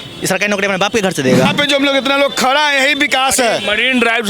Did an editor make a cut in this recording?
yes; 1 cut; at 1.4 s

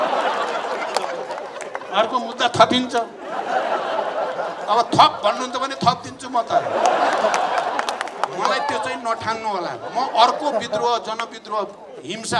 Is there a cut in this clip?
no; 0 cuts

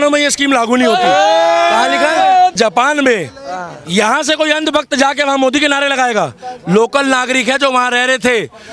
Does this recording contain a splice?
yes; 1 cut; at 2.5 s

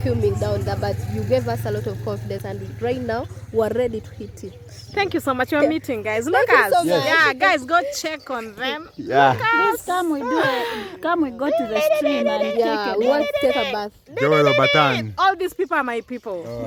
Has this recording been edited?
no; 0 cuts

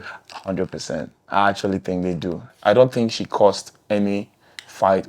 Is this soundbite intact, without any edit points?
no; 1 cut; at 2.5 s

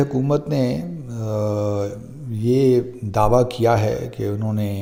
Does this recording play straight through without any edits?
yes; 0 cuts

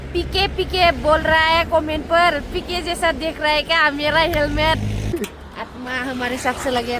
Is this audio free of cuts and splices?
no; 1 cut; at 5.1 s

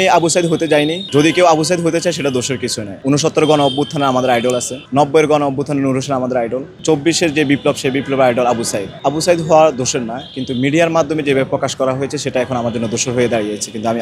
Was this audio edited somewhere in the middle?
yes; 5 cuts; at 1.0 s, 2.9 s, 4.8 s, 6.7 s, 8.8 s

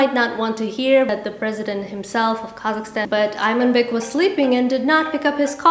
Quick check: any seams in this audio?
yes; 2 cuts; at 1.1 s, 3.0 s

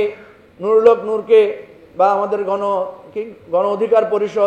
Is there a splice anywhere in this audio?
no; 0 cuts

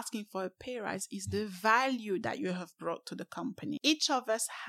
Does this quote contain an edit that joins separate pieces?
yes; 1 cut; at 3.8 s

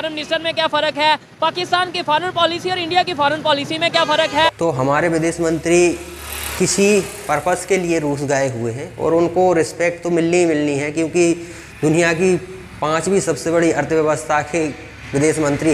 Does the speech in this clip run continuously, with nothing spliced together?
yes; 0 cuts

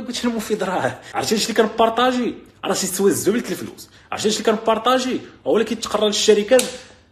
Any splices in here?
yes; 1 cut; at 1.0 s

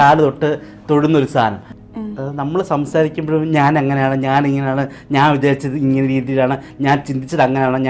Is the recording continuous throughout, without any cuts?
no; 1 cut; at 1.7 s

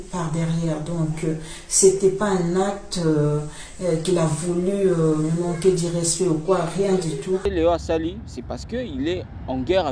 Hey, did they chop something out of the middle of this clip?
yes; 1 cut; at 7.4 s

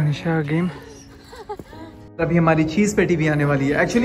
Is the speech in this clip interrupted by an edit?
yes; 1 cut; at 2.0 s

